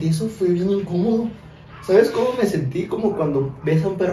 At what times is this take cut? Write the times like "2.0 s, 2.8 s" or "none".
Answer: none